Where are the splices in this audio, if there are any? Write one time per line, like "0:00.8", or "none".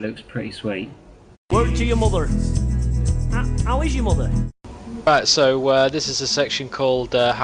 none